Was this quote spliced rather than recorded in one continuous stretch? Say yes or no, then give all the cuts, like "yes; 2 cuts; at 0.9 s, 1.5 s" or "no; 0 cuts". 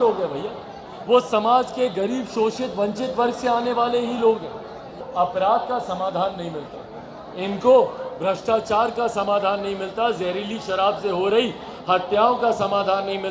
yes; 1 cut; at 5.0 s